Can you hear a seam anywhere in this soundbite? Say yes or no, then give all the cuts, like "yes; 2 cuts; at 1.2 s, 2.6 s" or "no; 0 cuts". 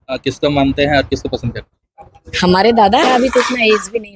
yes; 1 cut; at 3.0 s